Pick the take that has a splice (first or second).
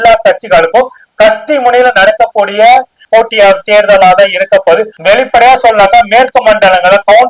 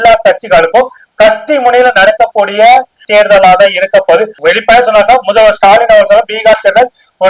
second